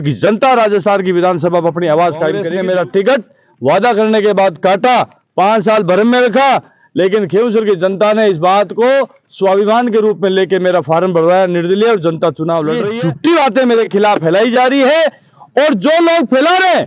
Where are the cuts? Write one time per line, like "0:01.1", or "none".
0:02.5
0:12.9